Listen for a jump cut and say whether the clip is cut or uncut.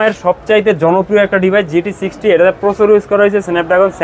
uncut